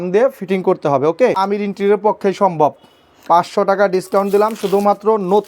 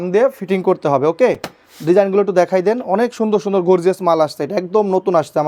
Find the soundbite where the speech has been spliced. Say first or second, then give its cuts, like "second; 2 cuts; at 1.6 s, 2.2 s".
first; 1 cut; at 1.4 s